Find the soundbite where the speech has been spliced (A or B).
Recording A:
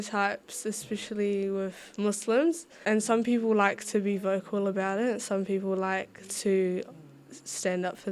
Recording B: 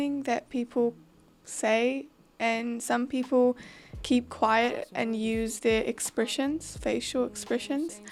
A